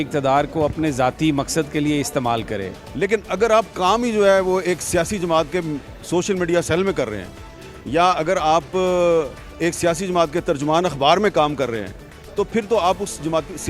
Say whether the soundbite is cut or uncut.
cut